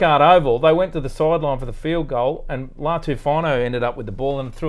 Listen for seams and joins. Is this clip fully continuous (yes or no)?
yes